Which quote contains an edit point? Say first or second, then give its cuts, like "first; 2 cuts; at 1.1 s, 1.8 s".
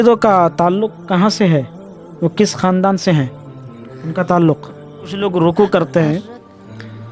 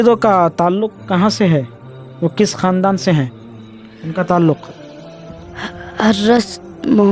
first; 1 cut; at 5.2 s